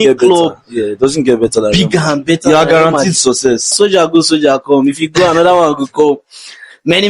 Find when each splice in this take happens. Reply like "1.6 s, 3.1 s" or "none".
3.7 s